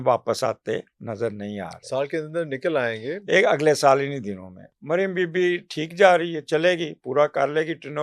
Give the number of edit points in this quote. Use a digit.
1